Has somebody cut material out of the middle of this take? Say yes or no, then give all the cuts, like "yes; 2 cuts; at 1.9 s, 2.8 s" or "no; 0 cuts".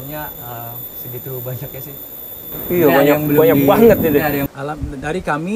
yes; 1 cut; at 4.5 s